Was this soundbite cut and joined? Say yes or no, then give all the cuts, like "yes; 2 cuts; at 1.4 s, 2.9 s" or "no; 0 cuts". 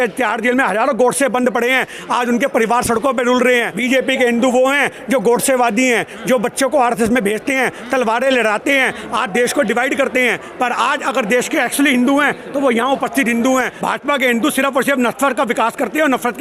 yes; 2 cuts; at 3.7 s, 13.8 s